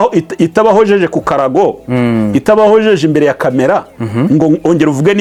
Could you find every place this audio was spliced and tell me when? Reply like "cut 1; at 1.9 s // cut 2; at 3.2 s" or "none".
none